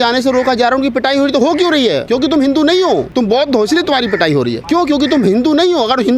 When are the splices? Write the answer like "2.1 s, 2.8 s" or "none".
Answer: 2.0 s, 3.1 s, 4.6 s